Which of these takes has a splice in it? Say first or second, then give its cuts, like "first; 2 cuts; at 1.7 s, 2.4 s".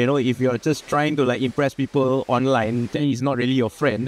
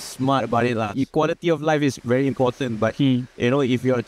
second; 1 cut; at 0.9 s